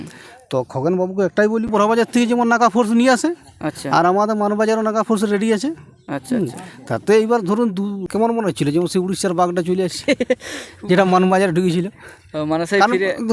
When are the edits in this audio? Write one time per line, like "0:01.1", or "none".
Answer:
0:01.7
0:08.1